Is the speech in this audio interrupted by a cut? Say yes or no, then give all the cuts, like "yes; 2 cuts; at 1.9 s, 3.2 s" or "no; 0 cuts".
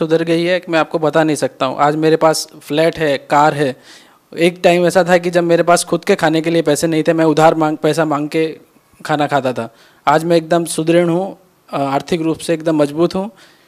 no; 0 cuts